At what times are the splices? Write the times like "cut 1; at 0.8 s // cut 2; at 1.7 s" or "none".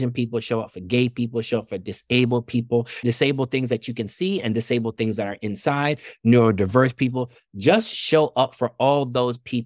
none